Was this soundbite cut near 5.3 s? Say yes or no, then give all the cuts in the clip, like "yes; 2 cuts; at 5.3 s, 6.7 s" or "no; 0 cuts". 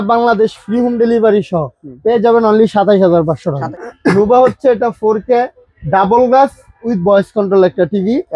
no; 1 cut; at 3.8 s